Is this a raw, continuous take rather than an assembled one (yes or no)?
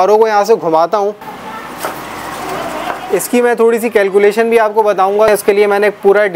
no